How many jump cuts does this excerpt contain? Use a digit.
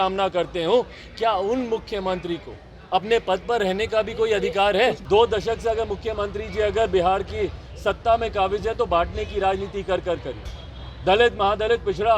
1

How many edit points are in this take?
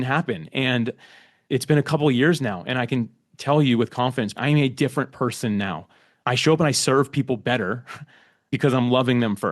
1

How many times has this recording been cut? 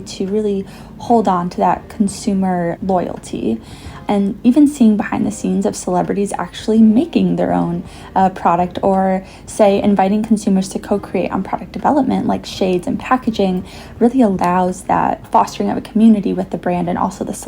3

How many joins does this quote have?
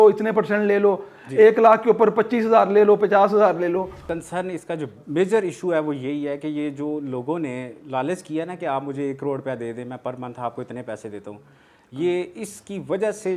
1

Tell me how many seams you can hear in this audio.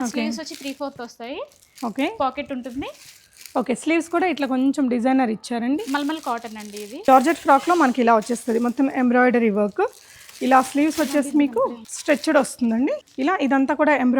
3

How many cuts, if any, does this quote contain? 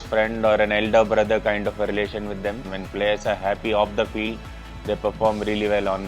1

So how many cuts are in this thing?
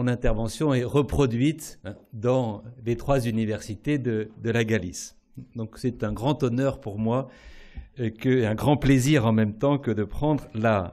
0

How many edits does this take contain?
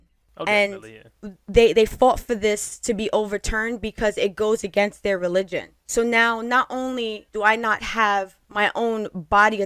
3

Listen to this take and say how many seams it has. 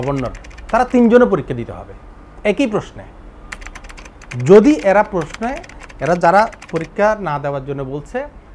0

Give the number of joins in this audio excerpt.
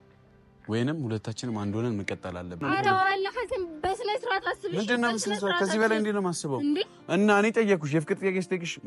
1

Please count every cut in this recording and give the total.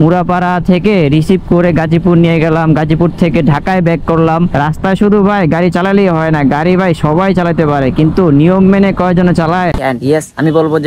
2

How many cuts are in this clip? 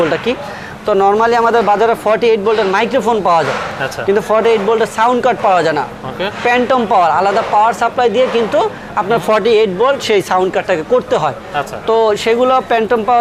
0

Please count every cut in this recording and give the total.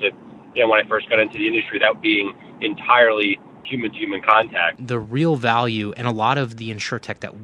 2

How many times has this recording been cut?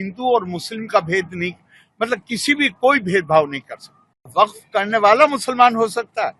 1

